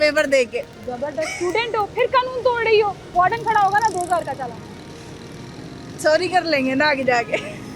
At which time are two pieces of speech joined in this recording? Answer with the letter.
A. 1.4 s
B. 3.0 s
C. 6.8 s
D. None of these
B